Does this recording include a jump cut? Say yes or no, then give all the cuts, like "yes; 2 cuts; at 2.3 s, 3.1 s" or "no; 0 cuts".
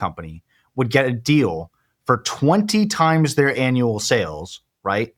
no; 0 cuts